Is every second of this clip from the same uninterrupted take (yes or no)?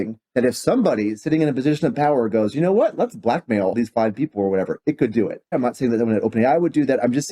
no